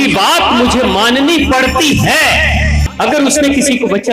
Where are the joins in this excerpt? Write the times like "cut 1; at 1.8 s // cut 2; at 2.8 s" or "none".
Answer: cut 1; at 2.8 s